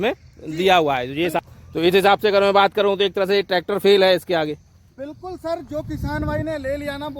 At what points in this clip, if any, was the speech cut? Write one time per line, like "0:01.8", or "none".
0:01.4